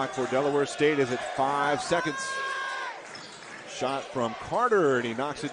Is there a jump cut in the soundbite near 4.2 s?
no; 0 cuts

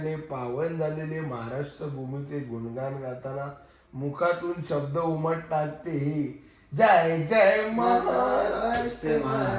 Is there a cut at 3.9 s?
no; 0 cuts

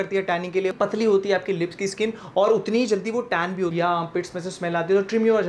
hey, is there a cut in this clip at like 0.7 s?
yes; 2 cuts; at 0.7 s, 3.7 s

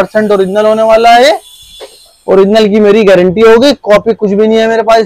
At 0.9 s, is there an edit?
no; 0 cuts

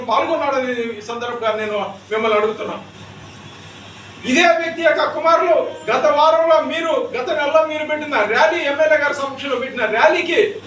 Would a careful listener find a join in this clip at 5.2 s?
no; 1 cut; at 1.3 s

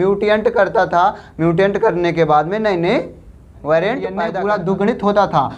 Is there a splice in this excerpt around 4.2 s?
yes; 1 cut; at 4.2 s

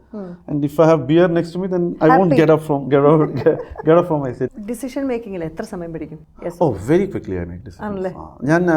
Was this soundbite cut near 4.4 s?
yes; 1 cut; at 4.4 s

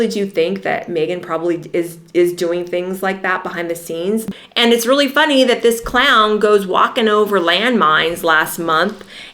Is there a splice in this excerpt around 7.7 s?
no; 1 cut; at 4.3 s

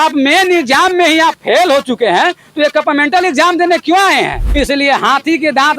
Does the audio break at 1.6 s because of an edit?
no; 1 cut; at 4.4 s

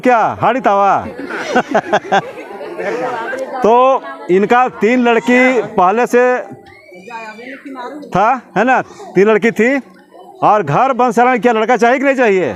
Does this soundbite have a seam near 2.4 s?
no; 0 cuts

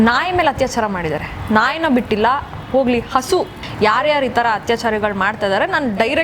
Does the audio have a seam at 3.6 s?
yes; 1 cut; at 3.6 s

